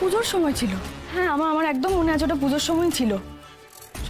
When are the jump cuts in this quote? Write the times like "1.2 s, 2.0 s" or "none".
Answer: 0.9 s